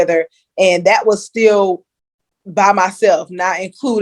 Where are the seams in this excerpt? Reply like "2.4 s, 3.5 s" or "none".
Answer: none